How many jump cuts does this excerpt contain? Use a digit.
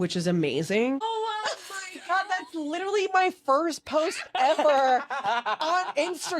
1